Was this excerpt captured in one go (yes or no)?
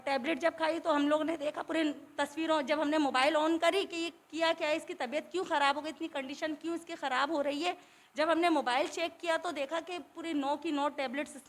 yes